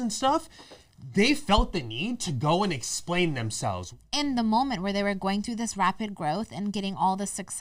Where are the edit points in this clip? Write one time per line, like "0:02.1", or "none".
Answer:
0:03.9